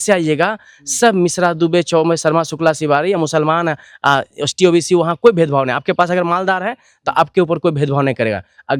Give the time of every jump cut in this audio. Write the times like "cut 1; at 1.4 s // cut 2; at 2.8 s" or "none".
none